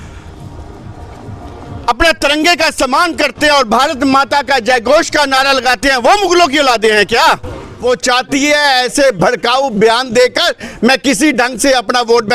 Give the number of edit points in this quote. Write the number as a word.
one